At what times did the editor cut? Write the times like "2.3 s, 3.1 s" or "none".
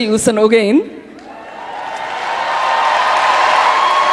none